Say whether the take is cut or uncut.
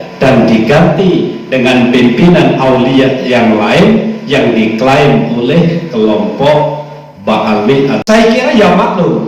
cut